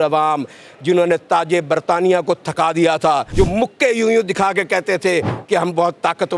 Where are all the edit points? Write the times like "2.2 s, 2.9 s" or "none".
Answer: 3.3 s